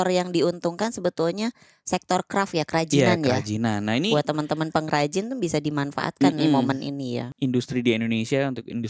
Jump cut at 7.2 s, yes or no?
yes